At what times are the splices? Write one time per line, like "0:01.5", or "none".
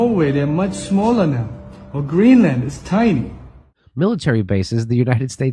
0:03.8

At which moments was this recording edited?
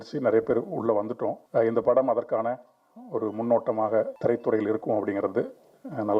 0:01.4
0:04.1

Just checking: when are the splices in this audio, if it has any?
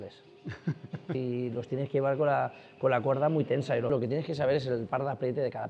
0:01.1
0:03.9

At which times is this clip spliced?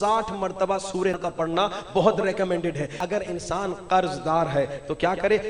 0:01.2
0:02.9

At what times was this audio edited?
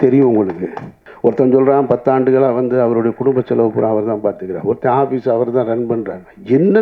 0:01.0

